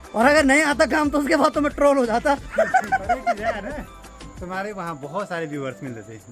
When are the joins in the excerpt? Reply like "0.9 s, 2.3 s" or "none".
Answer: none